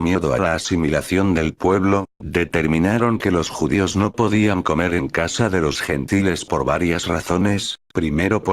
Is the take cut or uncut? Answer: cut